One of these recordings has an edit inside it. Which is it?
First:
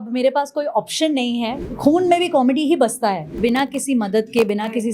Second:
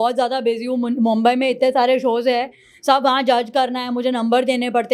first; 2 cuts; at 1.5 s, 3.4 s

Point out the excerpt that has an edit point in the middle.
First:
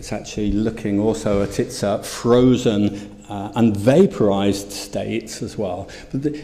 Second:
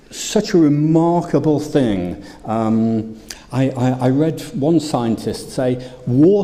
first; 1 cut; at 1.6 s

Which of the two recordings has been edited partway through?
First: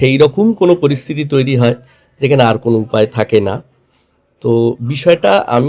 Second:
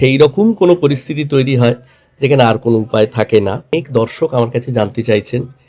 second; 1 cut; at 3.7 s

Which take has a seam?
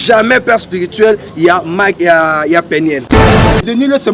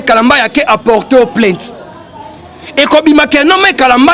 first; 1 cut; at 3.2 s

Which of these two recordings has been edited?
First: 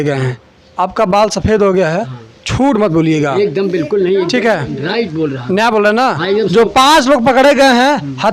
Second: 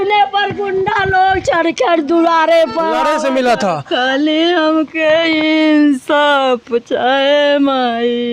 second; 1 cut; at 3.0 s

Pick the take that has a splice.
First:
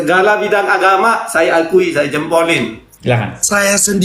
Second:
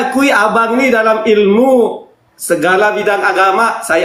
first; 1 cut; at 3.0 s

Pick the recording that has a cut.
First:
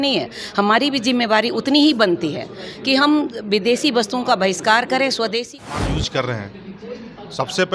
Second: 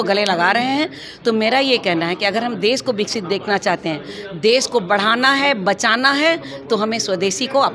first; 1 cut; at 5.6 s

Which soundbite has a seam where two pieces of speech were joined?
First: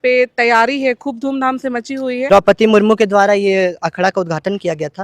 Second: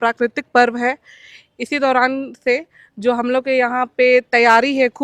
first; 1 cut; at 2.2 s

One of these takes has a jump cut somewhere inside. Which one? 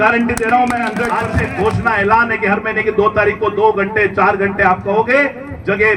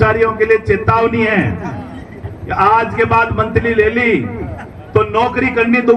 first; 1 cut; at 1.2 s

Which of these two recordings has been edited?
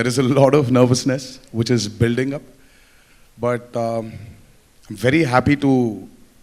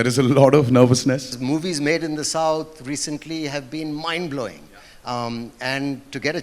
second; 1 cut; at 1.3 s

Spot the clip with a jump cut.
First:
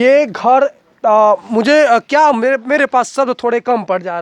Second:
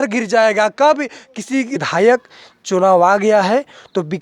second; 1 cut; at 1.8 s

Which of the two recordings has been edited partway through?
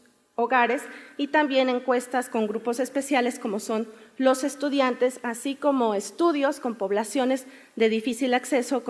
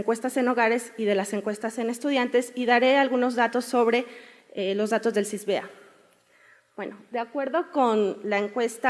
first; 1 cut; at 6.4 s

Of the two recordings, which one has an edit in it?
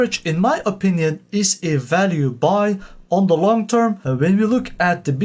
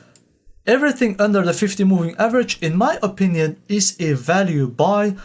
first; 1 cut; at 4.0 s

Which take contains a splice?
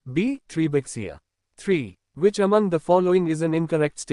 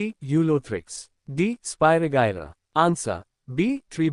first; 1 cut; at 1.6 s

